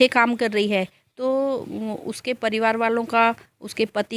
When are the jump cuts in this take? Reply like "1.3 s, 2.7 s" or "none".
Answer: none